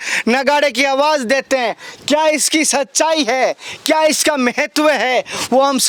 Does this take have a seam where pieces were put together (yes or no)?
no